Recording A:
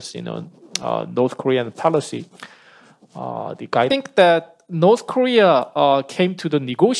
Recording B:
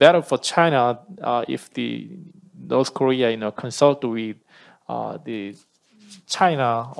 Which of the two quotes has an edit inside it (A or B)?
A